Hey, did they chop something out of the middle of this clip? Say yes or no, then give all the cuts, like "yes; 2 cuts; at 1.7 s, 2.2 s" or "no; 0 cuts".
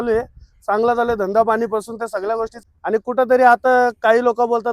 yes; 1 cut; at 2.6 s